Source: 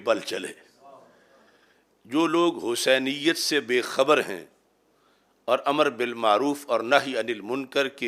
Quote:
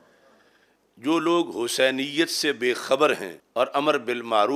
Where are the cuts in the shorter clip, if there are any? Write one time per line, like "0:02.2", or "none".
0:03.4